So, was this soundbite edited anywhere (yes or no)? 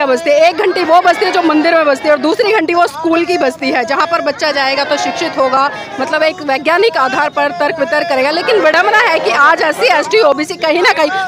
no